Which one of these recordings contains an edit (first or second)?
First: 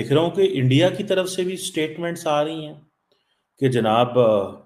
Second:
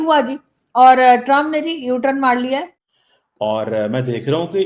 second